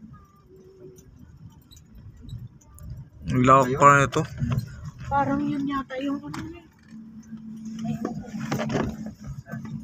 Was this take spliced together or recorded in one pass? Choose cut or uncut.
uncut